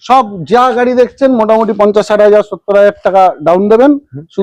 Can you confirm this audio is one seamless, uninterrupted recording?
yes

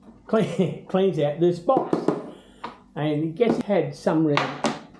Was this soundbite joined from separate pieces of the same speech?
yes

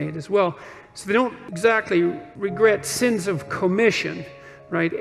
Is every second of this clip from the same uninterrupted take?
no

